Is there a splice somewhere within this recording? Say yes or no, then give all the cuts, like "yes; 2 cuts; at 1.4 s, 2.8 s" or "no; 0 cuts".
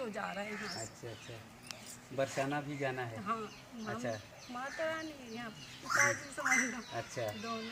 no; 0 cuts